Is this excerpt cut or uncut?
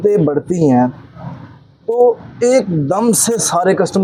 uncut